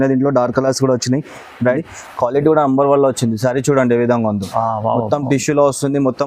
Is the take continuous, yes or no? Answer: no